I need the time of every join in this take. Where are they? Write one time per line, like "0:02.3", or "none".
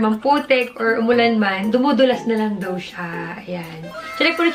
none